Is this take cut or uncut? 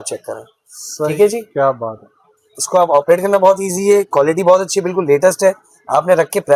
uncut